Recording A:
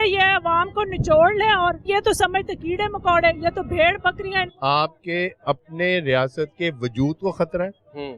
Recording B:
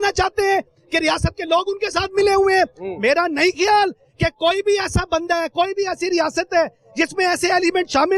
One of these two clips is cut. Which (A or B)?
A